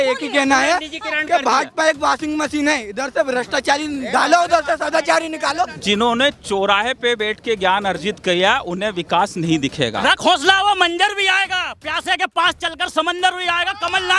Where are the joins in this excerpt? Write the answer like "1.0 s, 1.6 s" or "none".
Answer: 5.8 s, 10.0 s